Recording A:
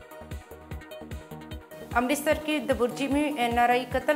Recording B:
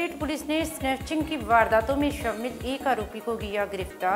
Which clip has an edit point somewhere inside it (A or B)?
A